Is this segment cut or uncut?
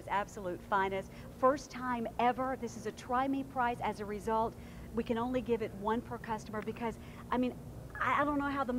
uncut